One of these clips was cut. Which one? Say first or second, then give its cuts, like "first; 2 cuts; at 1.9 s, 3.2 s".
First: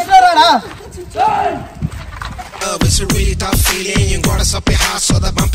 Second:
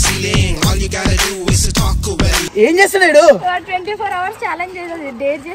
second; 1 cut; at 2.5 s